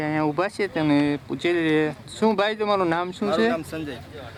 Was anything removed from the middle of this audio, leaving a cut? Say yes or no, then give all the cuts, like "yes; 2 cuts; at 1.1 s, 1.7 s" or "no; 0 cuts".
no; 0 cuts